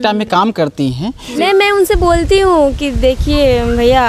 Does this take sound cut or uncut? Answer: cut